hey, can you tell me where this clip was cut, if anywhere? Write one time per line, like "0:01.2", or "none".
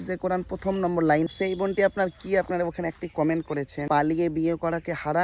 0:01.3